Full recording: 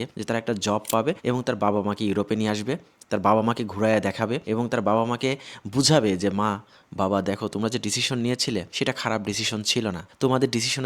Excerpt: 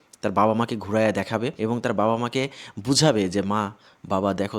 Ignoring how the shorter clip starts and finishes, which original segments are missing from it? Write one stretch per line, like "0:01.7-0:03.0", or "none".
none